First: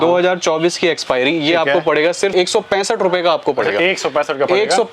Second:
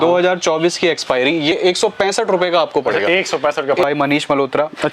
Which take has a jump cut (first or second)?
second